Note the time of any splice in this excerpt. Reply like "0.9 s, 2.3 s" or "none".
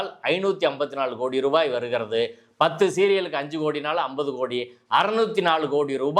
none